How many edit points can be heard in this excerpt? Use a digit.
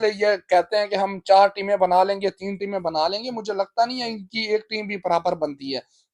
0